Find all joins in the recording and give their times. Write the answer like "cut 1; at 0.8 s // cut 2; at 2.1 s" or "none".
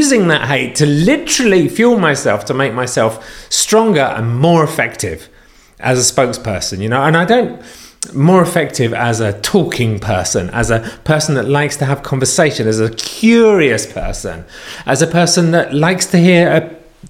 none